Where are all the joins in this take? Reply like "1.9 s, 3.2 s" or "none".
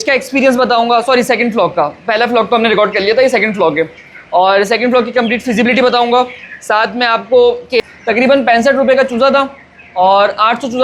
7.8 s

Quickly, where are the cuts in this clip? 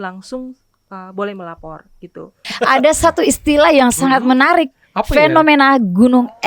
2.5 s

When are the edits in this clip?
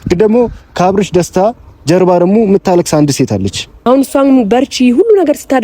3.7 s

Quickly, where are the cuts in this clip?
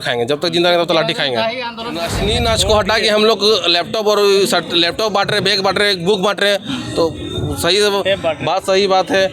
2.1 s

